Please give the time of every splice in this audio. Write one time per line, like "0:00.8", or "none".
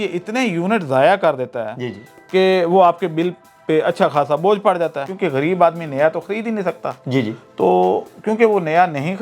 0:05.1